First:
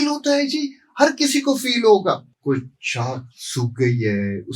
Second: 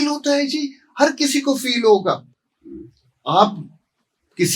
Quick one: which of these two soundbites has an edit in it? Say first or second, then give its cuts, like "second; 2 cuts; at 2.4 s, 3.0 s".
first; 1 cut; at 2.3 s